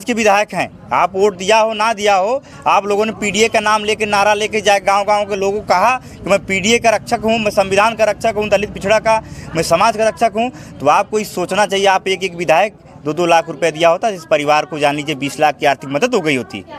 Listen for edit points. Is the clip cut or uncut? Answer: uncut